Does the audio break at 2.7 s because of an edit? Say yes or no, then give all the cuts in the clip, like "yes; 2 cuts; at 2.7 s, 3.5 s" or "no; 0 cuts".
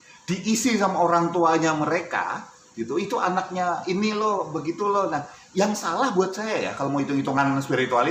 no; 0 cuts